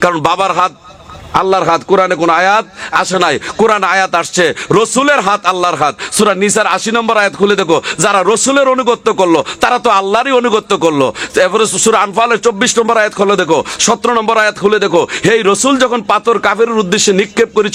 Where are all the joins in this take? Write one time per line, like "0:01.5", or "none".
none